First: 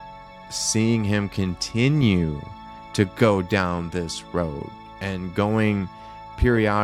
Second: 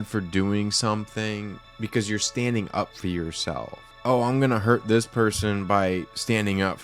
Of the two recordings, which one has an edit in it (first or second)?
second